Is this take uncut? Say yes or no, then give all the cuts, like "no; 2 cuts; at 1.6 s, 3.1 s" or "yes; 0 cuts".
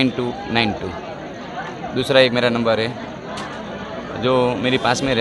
yes; 0 cuts